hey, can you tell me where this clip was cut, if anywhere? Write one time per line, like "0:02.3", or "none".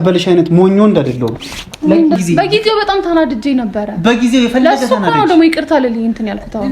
0:02.2